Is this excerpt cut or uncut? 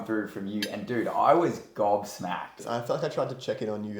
cut